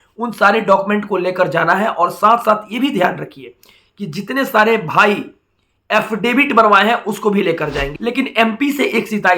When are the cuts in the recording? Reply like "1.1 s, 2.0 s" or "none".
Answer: 7.9 s